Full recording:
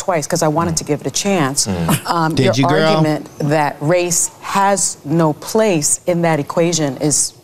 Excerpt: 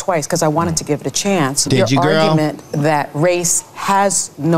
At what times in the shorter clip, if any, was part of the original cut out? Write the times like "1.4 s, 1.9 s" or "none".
1.6 s